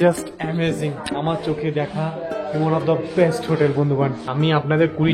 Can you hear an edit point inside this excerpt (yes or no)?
yes